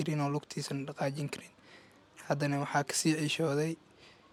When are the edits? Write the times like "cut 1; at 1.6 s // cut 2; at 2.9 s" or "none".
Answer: none